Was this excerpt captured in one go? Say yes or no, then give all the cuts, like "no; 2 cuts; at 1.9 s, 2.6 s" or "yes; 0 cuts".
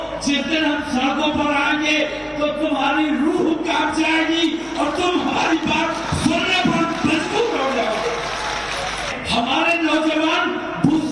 yes; 0 cuts